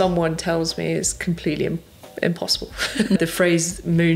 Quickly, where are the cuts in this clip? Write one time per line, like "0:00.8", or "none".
0:03.2